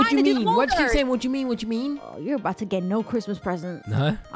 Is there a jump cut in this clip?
no; 0 cuts

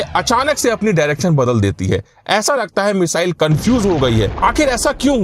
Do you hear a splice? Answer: yes; 1 cut; at 4.3 s

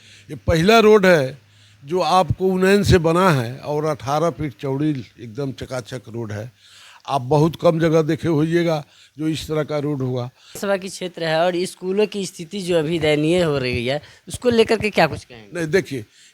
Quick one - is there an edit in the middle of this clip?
yes; 1 cut; at 10.6 s

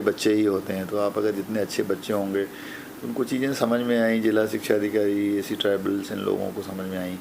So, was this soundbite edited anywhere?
no; 0 cuts

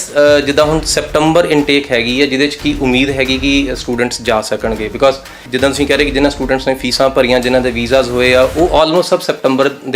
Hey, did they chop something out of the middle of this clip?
yes; 1 cut; at 5.4 s

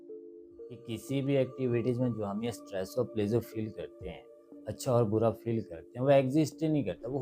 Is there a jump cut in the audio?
yes; 1 cut; at 0.9 s

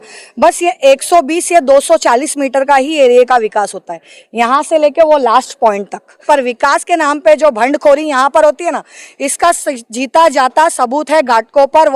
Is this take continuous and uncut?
no; 1 cut; at 6.1 s

